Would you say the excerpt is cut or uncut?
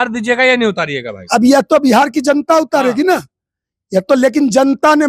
uncut